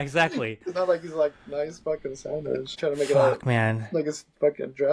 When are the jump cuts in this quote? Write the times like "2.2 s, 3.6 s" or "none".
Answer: 2.8 s